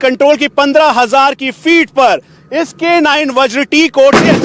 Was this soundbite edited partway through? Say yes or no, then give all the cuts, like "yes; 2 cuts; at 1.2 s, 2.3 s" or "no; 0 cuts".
no; 0 cuts